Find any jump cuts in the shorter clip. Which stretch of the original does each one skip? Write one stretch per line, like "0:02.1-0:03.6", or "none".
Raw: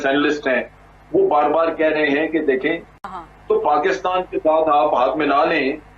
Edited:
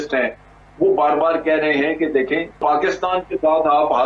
0:02.9-0:03.6